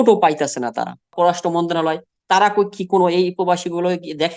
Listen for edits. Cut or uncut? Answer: cut